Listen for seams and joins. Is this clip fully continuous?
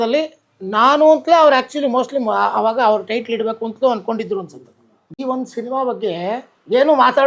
no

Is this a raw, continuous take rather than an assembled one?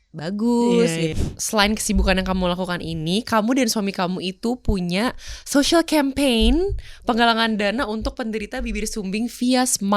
no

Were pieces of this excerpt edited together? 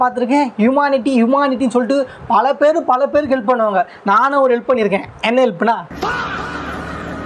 yes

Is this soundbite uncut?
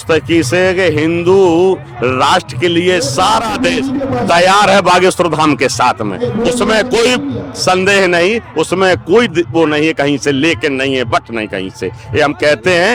yes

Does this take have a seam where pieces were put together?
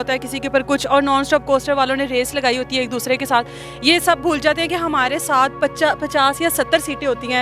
no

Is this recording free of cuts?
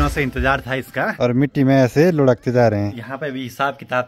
no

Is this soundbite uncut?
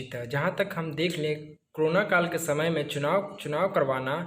yes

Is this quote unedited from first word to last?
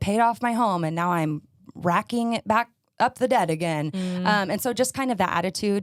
yes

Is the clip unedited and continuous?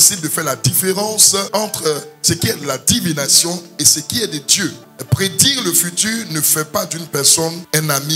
yes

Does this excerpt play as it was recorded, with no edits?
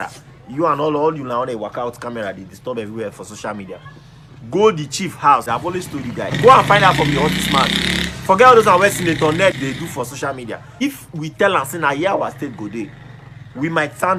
yes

